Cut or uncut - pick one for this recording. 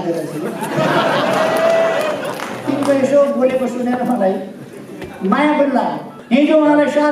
cut